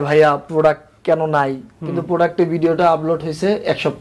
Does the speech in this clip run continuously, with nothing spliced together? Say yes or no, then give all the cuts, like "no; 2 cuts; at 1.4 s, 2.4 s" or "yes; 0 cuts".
yes; 0 cuts